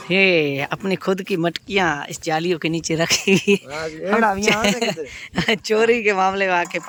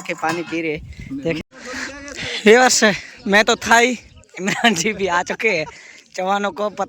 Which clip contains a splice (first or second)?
second